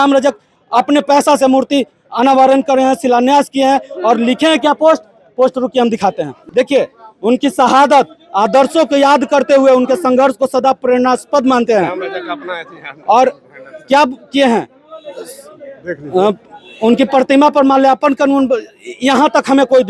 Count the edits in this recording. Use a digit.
0